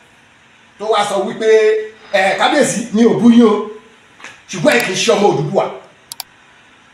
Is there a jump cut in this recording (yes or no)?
no